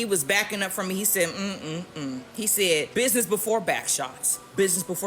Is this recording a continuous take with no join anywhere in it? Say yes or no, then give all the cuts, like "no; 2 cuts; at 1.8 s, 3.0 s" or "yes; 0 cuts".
no; 1 cut; at 2.9 s